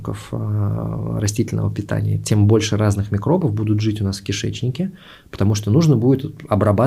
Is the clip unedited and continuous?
yes; 0 cuts

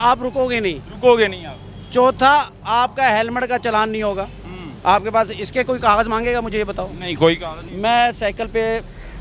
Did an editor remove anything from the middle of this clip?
yes; 1 cut; at 7.6 s

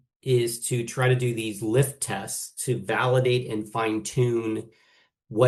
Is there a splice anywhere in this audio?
no; 0 cuts

